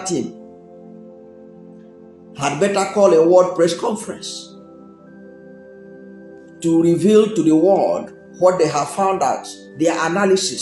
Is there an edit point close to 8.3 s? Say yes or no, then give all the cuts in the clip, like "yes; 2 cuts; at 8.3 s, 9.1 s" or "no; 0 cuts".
no; 4 cuts; at 0.8 s, 2.4 s, 4.2 s, 6.3 s